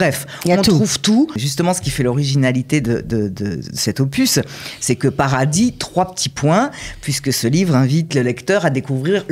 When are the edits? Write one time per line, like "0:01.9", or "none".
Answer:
0:01.4
0:08.1